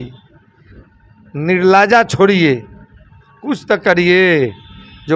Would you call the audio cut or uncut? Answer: uncut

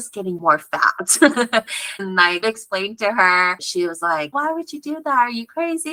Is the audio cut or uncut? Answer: uncut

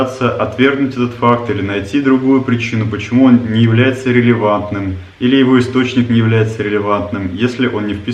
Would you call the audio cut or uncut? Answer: uncut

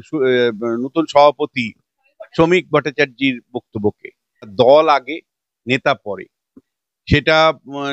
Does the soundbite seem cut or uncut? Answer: cut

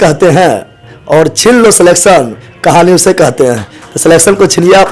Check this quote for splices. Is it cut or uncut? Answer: uncut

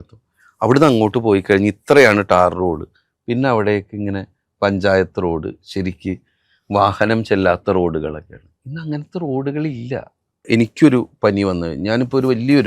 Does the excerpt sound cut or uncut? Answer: cut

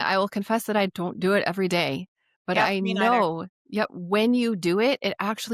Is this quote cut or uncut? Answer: uncut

